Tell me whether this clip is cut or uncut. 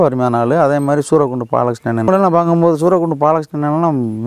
cut